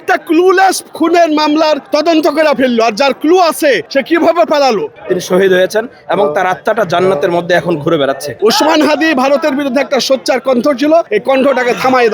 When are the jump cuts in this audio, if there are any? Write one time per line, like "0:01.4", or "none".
0:01.8
0:03.9
0:05.0
0:08.3
0:11.1